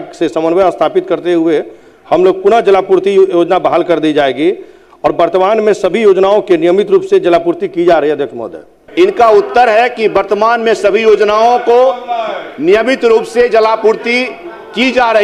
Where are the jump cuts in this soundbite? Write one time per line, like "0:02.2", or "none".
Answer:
0:08.8